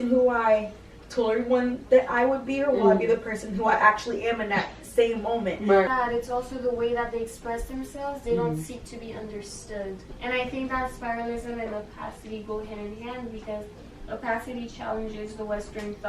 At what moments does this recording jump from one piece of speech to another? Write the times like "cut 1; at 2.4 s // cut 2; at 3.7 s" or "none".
cut 1; at 5.9 s // cut 2; at 10.0 s